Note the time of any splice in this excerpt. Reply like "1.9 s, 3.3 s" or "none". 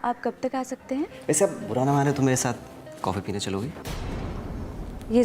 1.1 s